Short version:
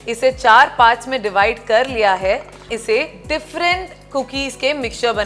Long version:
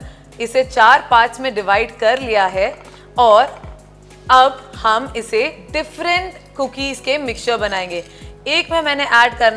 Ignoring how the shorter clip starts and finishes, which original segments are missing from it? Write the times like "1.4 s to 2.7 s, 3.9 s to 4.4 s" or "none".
3.0 s to 5.1 s